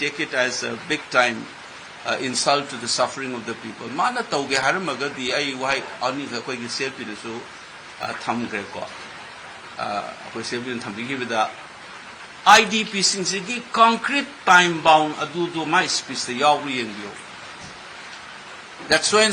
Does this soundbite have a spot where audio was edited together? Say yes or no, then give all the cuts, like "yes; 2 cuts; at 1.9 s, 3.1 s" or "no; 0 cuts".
no; 0 cuts